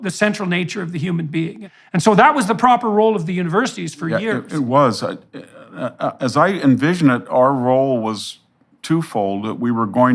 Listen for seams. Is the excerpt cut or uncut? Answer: cut